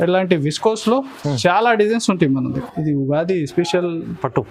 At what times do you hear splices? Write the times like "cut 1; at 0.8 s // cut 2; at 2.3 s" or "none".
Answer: cut 1; at 2.7 s